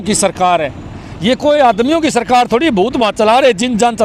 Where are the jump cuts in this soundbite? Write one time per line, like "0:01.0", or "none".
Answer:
none